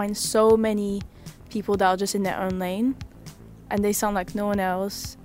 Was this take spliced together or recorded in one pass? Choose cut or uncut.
uncut